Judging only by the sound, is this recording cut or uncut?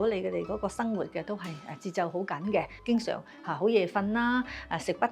cut